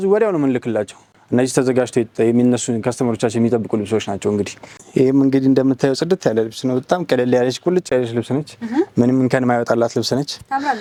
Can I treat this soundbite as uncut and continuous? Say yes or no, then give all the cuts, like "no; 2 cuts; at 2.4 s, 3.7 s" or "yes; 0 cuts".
yes; 0 cuts